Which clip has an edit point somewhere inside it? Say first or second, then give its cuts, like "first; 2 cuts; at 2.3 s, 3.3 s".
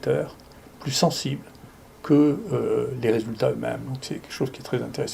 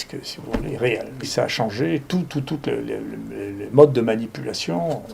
second; 1 cut; at 1.3 s